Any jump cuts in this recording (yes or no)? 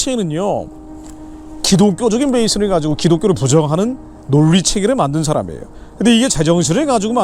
no